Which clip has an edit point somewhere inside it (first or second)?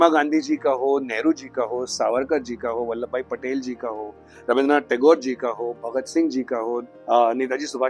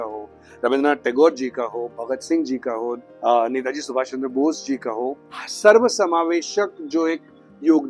second